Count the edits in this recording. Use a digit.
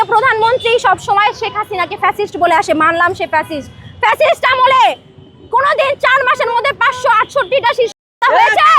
0